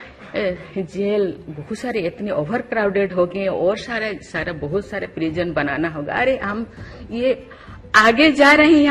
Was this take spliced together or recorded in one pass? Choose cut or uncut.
uncut